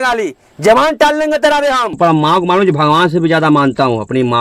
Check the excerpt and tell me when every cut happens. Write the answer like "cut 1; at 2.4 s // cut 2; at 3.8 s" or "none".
cut 1; at 2.0 s